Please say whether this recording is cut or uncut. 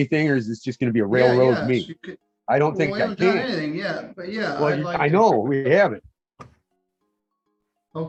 uncut